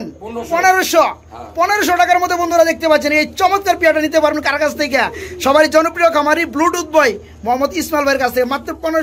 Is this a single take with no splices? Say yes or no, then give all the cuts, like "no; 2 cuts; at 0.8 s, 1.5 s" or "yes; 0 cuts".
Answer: yes; 0 cuts